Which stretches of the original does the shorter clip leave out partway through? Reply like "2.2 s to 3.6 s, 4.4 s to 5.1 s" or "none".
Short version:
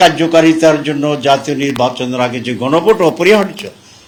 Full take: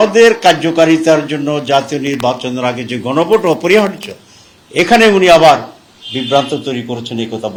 none

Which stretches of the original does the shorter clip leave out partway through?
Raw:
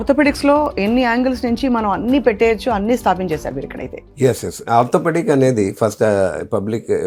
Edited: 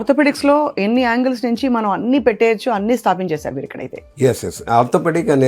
none

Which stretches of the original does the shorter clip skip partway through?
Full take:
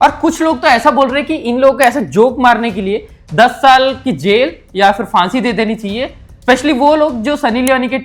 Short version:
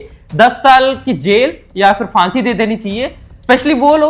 none

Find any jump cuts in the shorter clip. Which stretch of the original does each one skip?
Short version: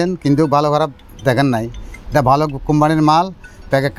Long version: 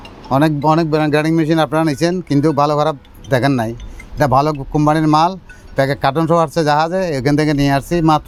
none

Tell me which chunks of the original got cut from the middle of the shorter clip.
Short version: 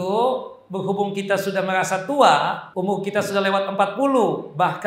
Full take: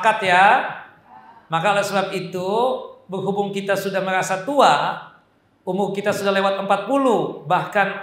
5.0 s to 5.6 s

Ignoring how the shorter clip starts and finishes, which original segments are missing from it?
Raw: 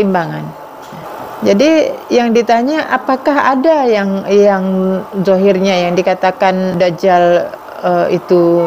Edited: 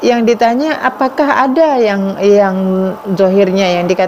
none

